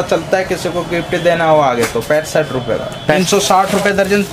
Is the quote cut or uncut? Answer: cut